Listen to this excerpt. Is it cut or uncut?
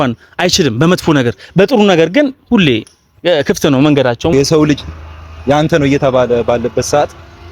cut